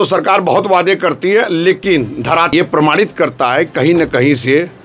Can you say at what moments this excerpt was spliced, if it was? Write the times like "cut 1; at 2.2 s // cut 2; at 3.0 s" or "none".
cut 1; at 2.5 s